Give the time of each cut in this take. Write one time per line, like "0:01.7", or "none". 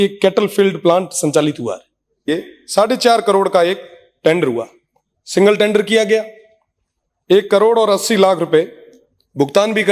0:02.3